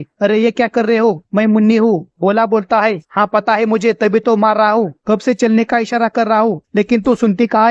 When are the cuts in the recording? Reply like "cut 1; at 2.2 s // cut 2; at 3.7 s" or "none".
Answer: none